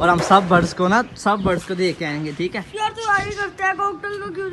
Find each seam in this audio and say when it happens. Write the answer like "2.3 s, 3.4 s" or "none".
none

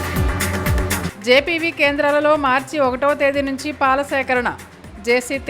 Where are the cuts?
none

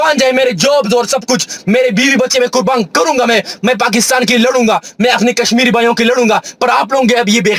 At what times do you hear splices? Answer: none

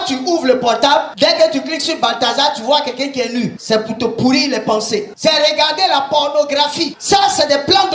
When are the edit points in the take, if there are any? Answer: 5.1 s, 6.9 s

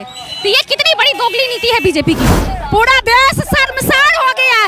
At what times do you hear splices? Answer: 2.5 s

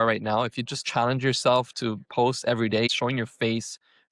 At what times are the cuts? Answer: 0.8 s, 2.9 s

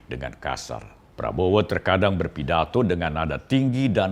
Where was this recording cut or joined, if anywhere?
1.0 s

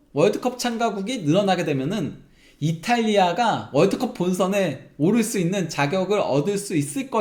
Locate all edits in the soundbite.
none

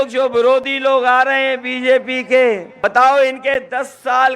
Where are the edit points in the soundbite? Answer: 2.7 s

